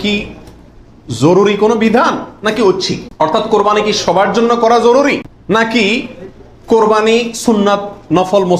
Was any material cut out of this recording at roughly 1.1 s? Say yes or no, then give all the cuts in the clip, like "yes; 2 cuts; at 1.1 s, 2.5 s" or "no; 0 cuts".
no; 2 cuts; at 3.0 s, 5.3 s